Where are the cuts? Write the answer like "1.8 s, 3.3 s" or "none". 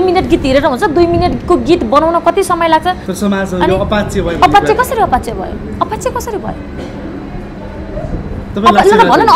3.1 s